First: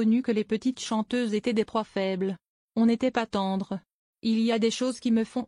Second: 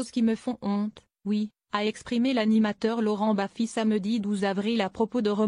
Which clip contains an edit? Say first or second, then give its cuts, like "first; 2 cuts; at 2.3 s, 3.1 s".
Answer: second; 1 cut; at 1.0 s